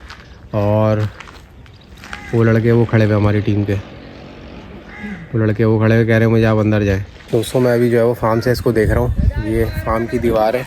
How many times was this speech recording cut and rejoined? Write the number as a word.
one